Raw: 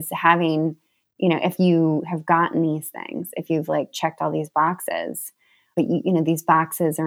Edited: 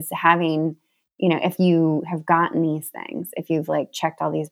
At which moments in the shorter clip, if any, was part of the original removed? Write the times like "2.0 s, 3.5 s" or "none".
none